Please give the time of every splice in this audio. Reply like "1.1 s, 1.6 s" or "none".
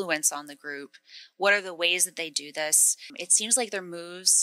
3.2 s